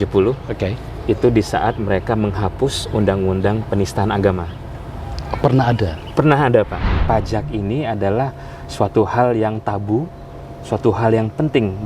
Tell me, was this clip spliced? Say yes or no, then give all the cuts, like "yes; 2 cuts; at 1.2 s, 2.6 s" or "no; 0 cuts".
yes; 1 cut; at 7.0 s